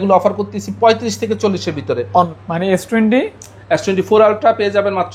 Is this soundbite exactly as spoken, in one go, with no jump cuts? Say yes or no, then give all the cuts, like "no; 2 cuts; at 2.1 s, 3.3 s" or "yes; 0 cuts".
no; 1 cut; at 2.3 s